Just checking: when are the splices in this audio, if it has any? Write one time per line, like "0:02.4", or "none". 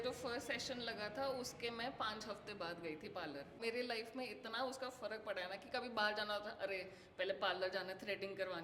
0:03.6